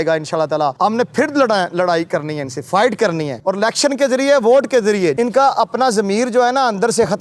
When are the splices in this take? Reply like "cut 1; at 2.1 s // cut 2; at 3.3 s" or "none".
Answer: none